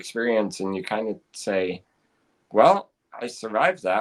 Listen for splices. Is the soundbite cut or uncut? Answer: uncut